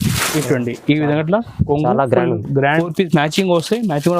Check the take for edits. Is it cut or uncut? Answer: cut